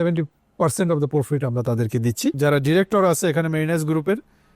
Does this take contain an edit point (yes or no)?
yes